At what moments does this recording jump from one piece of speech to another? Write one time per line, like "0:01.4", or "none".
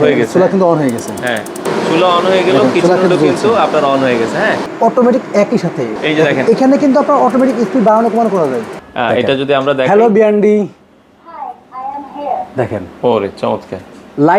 0:01.6
0:04.7
0:05.9
0:08.7